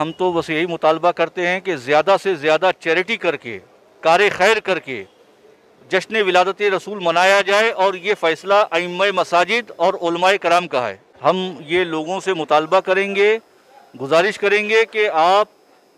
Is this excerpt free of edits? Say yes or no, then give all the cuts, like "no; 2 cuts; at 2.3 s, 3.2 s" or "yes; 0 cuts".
no; 1 cut; at 11.0 s